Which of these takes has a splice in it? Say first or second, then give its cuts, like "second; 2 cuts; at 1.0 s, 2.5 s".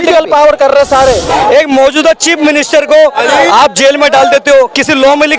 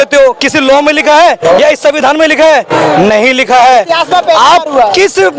first; 1 cut; at 1.3 s